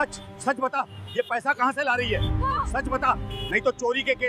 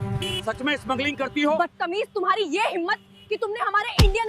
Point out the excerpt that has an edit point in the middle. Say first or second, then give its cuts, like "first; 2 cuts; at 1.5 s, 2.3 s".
second; 1 cut; at 1.6 s